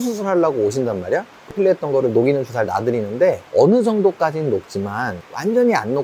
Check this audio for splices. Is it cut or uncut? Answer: cut